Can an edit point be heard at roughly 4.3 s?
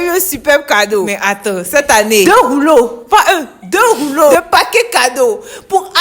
yes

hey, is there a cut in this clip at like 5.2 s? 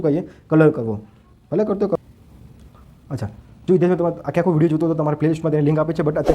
no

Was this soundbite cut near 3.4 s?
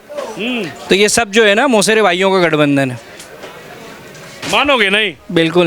no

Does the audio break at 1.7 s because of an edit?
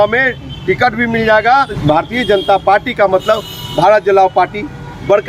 yes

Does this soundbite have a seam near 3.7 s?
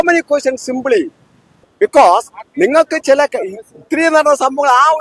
no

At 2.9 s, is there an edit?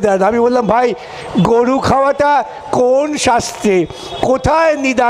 no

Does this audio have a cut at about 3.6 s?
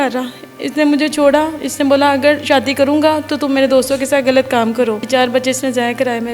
no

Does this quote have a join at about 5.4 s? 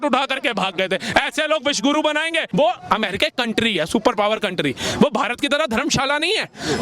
no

